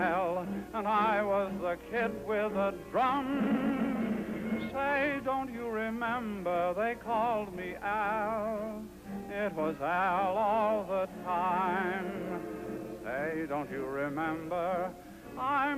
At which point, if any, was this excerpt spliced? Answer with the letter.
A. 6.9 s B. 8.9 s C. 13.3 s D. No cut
C